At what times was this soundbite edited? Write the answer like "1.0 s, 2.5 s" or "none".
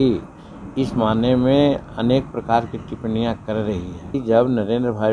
4.1 s